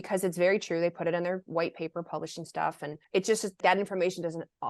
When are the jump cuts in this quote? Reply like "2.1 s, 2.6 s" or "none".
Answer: 3.6 s